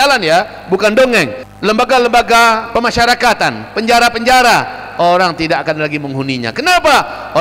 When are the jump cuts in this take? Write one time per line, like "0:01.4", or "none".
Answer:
0:01.4
0:02.6